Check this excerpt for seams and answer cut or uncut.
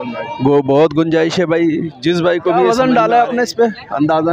cut